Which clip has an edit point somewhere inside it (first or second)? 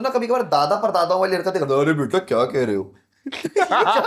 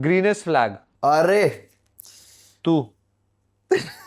second